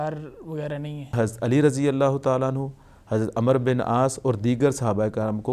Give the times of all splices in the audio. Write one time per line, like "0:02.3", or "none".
0:01.1